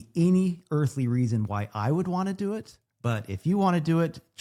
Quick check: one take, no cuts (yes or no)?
yes